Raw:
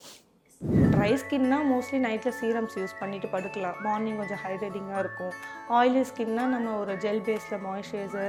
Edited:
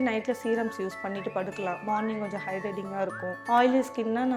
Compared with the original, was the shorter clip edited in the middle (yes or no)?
yes